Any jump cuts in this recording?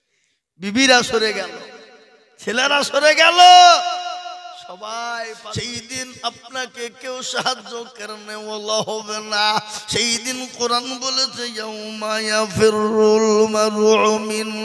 yes; 1 cut; at 5.7 s

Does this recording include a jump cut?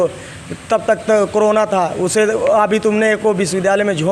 no; 0 cuts

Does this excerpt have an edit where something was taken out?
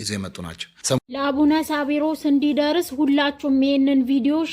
yes; 1 cut; at 1.0 s

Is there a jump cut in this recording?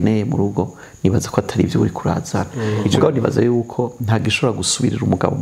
yes; 1 cut; at 2.8 s

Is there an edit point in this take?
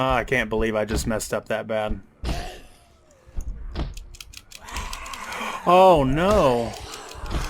no; 0 cuts

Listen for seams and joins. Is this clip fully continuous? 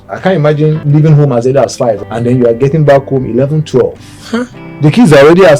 no; 2 cuts; at 0.8 s, 2.1 s

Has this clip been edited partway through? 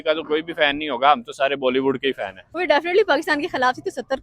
yes; 1 cut; at 2.6 s

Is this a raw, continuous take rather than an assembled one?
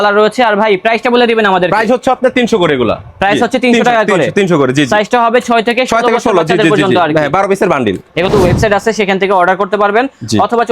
no; 1 cut; at 8.3 s

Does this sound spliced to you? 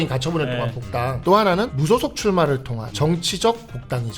yes; 3 cuts; at 1.1 s, 1.8 s, 2.8 s

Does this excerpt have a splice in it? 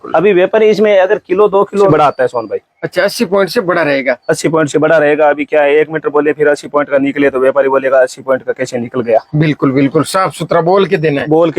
yes; 1 cut; at 1.9 s

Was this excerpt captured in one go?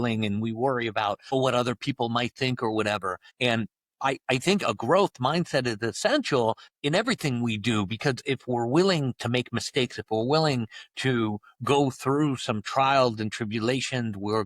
no; 3 cuts; at 1.3 s, 3.2 s, 6.7 s

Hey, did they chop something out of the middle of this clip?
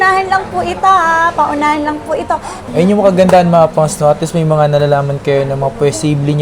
yes; 1 cut; at 2.6 s

